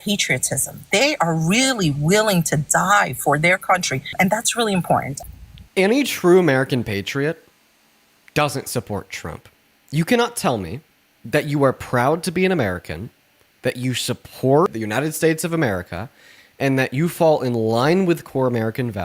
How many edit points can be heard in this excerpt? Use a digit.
3